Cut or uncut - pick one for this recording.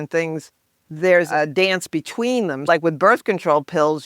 cut